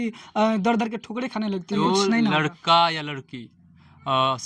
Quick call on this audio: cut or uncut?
cut